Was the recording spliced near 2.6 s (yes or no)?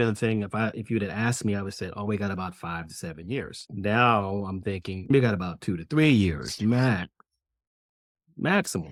no